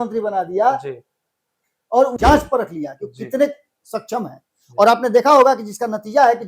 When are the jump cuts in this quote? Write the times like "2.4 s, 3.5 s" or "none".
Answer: 2.1 s